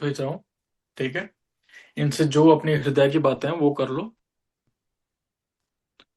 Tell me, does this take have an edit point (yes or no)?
yes